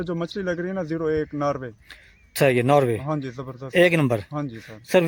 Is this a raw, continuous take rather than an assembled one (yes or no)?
yes